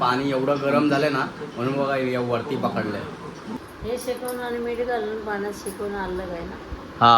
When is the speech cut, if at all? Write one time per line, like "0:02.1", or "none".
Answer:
0:03.6